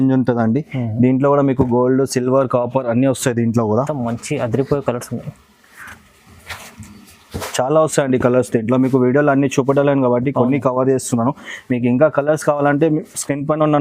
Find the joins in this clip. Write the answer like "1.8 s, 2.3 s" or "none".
3.9 s